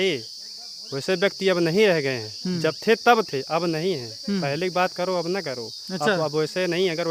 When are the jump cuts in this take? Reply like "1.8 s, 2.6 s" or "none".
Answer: none

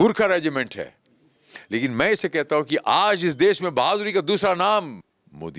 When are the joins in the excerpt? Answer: none

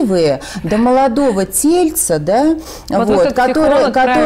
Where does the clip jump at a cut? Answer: none

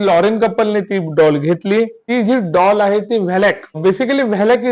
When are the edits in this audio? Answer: 2.0 s, 3.8 s

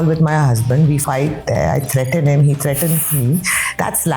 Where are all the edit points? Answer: 1.0 s

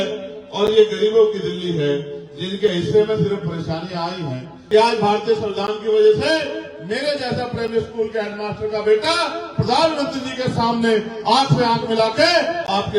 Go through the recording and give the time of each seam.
4.6 s

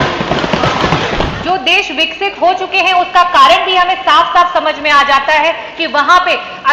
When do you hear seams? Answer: 1.3 s

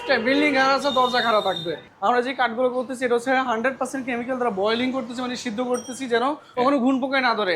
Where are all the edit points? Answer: 1.9 s, 6.6 s

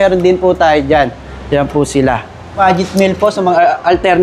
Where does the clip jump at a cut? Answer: 2.6 s

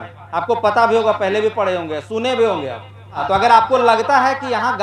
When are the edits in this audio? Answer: 3.2 s

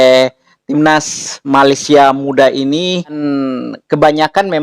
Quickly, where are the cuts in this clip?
3.2 s

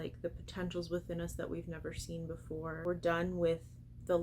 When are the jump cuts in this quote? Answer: 2.8 s

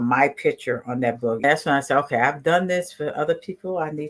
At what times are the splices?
1.4 s

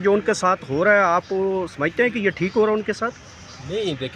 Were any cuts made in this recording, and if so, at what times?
none

